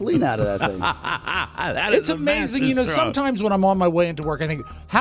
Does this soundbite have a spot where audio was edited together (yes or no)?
no